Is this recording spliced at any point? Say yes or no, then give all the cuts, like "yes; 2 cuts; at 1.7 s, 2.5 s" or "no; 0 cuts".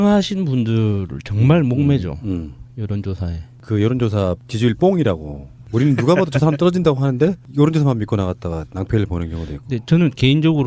no; 0 cuts